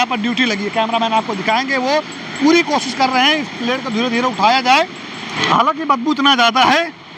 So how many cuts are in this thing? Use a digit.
1